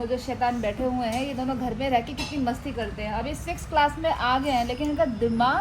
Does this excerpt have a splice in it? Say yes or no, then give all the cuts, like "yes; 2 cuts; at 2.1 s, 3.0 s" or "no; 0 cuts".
yes; 1 cut; at 3.0 s